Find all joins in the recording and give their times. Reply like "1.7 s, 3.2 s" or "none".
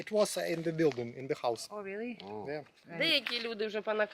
2.8 s

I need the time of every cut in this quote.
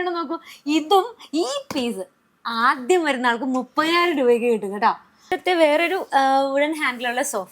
5.3 s

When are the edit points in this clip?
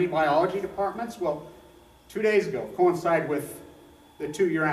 2.9 s

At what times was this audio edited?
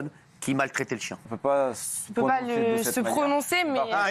1.3 s

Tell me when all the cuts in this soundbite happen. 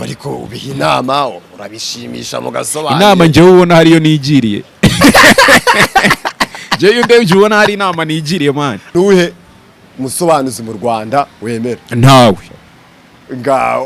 8.9 s

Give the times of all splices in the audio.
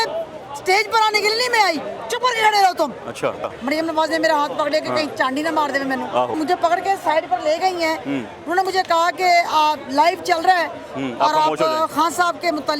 3.5 s, 6.4 s

